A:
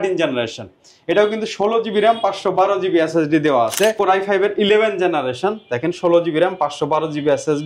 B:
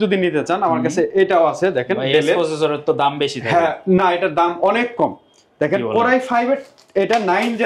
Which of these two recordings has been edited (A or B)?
A